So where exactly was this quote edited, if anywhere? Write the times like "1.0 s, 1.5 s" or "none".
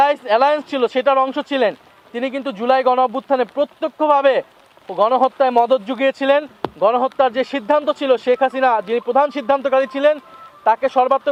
none

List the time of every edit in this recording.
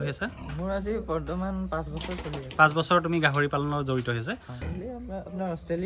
4.5 s

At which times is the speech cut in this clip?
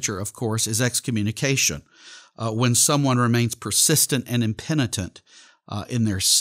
none

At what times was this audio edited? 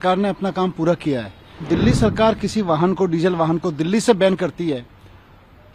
1.6 s

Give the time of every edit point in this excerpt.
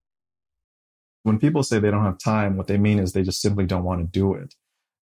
1.2 s

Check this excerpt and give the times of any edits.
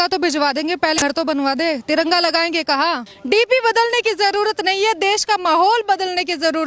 1.0 s, 3.1 s

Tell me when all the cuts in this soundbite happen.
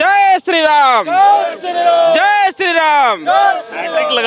none

